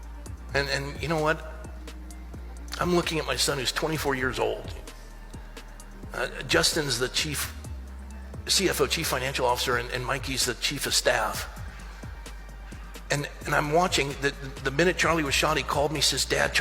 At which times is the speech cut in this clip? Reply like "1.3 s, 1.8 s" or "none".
11.5 s, 13.1 s